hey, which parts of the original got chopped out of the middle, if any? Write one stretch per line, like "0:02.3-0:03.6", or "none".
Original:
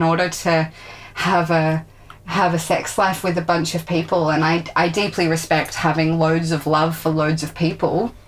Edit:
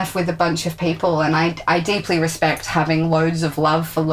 none